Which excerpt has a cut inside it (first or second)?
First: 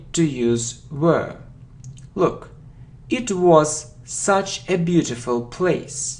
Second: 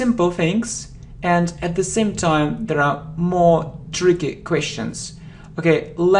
second